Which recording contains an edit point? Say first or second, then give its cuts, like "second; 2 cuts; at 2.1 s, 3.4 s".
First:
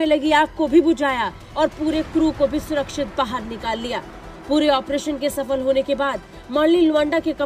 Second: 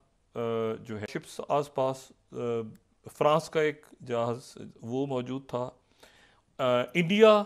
second; 1 cut; at 1.0 s